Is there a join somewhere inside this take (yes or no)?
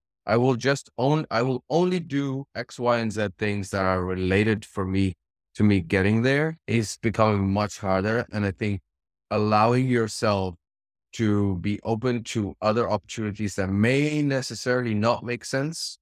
yes